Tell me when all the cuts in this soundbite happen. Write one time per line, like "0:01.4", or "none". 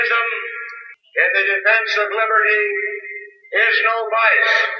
none